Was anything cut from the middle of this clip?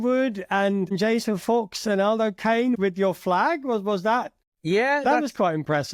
no; 0 cuts

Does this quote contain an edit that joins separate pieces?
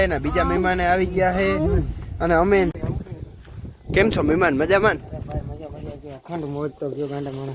yes; 1 cut; at 2.7 s

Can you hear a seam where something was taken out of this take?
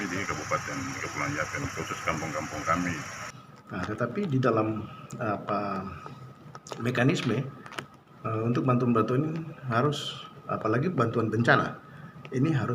yes; 1 cut; at 3.5 s

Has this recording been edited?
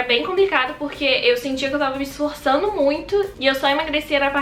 no; 0 cuts

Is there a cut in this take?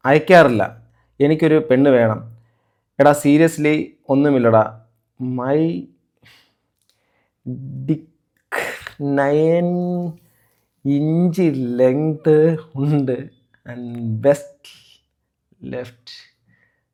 no; 0 cuts

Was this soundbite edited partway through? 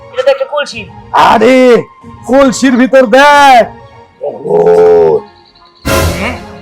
no; 0 cuts

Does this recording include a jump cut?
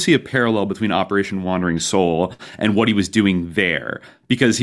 no; 0 cuts

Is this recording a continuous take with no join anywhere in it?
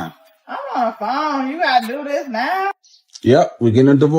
no; 1 cut; at 2.7 s

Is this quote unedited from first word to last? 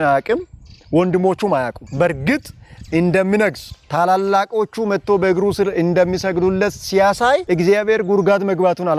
no; 1 cut; at 1.8 s

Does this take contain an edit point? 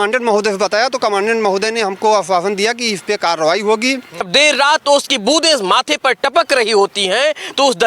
yes; 1 cut; at 4.3 s

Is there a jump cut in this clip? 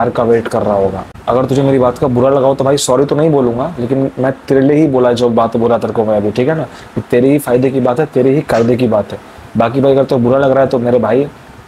yes; 1 cut; at 1.1 s

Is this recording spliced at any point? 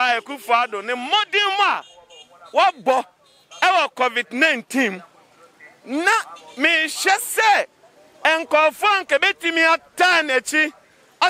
no; 0 cuts

